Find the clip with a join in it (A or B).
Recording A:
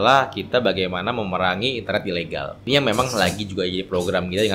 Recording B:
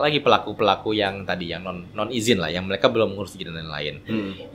A